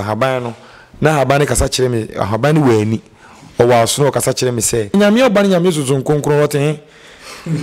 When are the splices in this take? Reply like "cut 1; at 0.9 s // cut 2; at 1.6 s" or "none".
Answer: cut 1; at 4.9 s